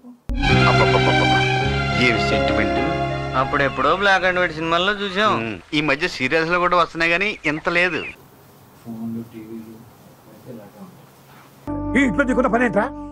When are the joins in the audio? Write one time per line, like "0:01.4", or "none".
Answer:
none